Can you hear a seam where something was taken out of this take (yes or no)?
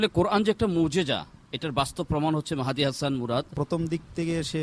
yes